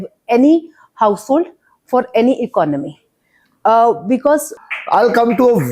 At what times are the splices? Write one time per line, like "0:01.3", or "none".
0:04.6